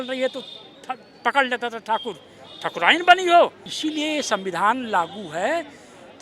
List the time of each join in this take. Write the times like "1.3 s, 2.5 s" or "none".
3.6 s